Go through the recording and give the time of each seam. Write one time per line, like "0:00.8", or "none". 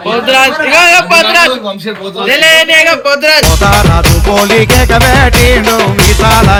none